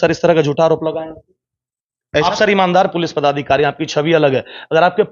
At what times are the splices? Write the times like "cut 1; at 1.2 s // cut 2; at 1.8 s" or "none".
none